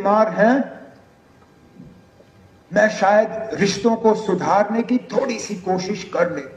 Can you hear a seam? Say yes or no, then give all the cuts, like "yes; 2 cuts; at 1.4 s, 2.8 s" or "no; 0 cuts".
no; 0 cuts